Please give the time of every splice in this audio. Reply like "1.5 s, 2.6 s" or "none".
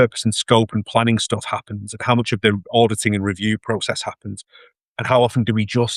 none